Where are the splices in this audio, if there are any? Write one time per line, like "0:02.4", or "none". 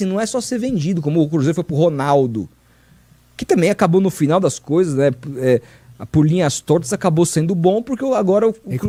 none